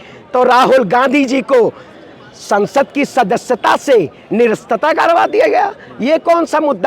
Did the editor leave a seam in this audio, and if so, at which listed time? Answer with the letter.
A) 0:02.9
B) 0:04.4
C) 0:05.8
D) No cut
D